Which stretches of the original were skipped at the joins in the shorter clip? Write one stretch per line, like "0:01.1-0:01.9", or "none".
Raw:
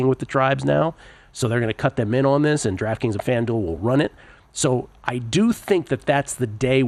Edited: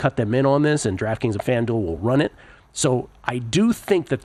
none